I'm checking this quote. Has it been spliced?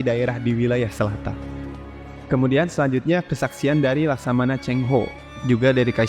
yes; 1 cut; at 1.7 s

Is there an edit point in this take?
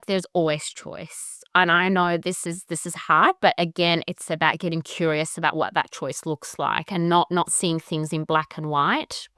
no; 0 cuts

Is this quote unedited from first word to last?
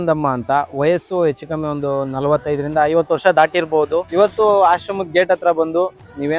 no; 1 cut; at 4.1 s

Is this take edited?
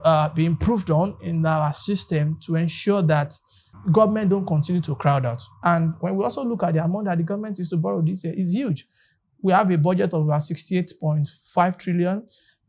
yes; 1 cut; at 3.7 s

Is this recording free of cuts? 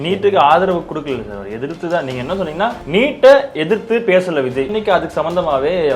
no; 2 cuts; at 2.8 s, 4.7 s

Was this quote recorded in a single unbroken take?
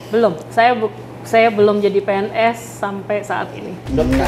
yes; 0 cuts

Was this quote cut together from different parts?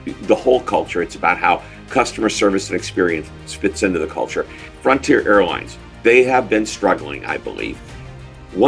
yes; 1 cut; at 4.6 s

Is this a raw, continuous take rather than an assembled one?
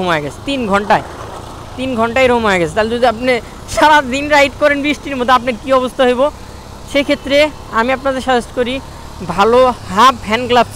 yes; 0 cuts

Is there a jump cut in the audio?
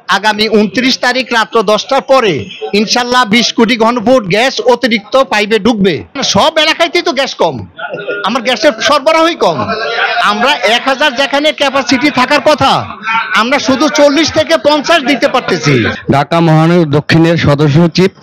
yes; 2 cuts; at 6.2 s, 15.9 s

